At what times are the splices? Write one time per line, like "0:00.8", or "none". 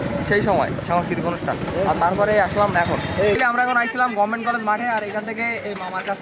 0:03.4